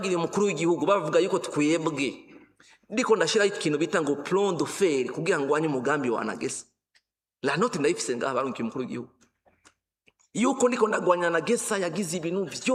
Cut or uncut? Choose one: uncut